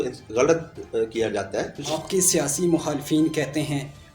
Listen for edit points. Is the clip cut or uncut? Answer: cut